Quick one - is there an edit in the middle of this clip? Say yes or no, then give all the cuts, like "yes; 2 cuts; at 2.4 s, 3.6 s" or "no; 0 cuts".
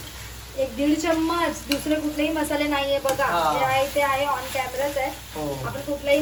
no; 0 cuts